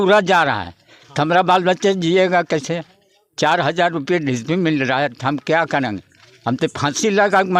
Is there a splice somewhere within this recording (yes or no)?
no